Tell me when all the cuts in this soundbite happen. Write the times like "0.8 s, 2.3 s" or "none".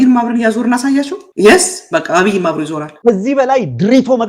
1.2 s, 2.9 s